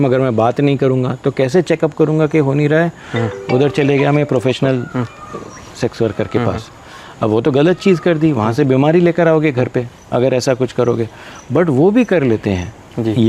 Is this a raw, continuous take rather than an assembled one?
yes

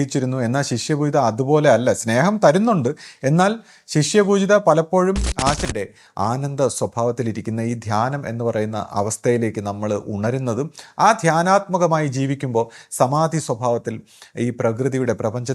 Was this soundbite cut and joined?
yes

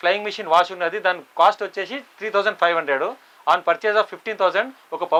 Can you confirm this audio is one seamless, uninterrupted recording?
yes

